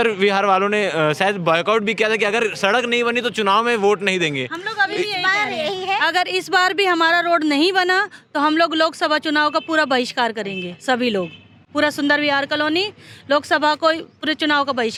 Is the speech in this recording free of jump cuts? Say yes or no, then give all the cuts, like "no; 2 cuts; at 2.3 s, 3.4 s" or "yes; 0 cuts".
yes; 0 cuts